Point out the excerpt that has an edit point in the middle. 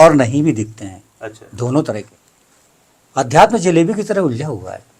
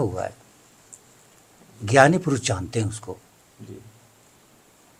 first; 1 cut; at 2.1 s

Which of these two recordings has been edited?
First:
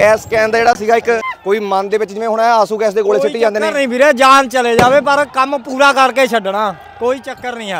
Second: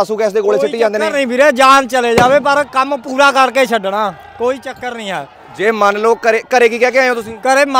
first; 1 cut; at 1.3 s

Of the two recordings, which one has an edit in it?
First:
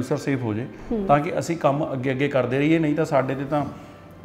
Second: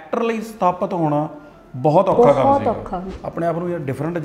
second; 1 cut; at 3.1 s

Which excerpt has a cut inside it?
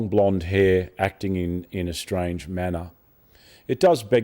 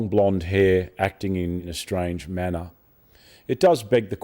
second; 1 cut; at 1.7 s

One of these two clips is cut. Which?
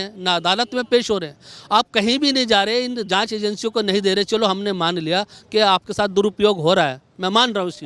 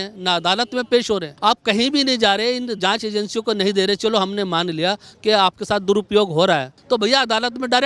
second; 2 cuts; at 1.3 s, 6.7 s

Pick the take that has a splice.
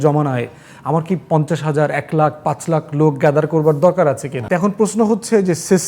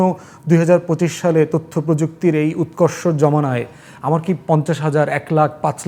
first; 1 cut; at 4.3 s

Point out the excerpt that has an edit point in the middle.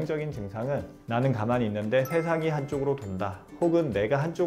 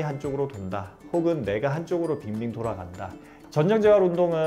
second; 1 cut; at 3.3 s

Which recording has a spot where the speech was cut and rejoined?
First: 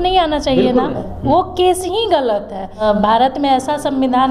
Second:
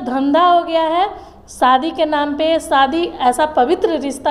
first; 2 cuts; at 1.1 s, 2.8 s

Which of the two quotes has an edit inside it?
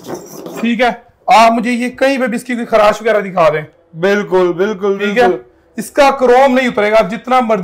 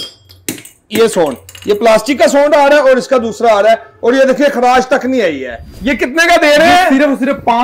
second; 1 cut; at 5.8 s

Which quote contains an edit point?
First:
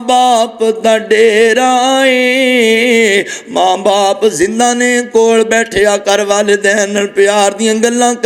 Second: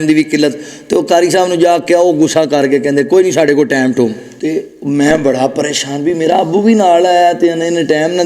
second; 1 cut; at 4.3 s

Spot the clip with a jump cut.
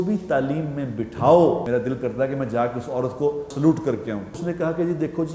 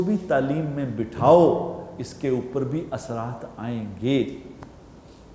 first; 3 cuts; at 1.6 s, 3.5 s, 4.4 s

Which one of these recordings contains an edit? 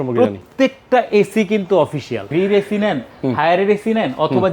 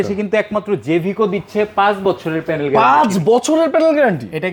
first; 1 cut; at 2.2 s

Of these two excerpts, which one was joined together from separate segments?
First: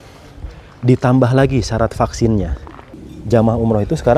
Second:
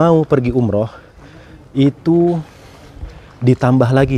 first; 1 cut; at 3.0 s

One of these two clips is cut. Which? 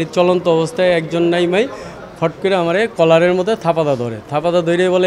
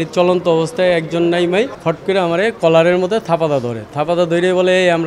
second; 1 cut; at 1.8 s

